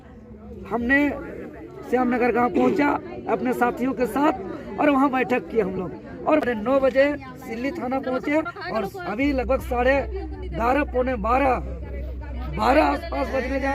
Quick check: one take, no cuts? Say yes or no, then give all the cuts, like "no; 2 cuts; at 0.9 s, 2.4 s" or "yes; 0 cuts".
no; 1 cut; at 6.4 s